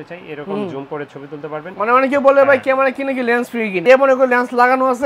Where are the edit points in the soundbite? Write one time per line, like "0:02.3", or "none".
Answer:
0:01.7
0:03.8